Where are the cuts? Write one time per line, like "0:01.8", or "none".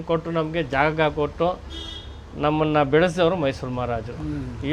none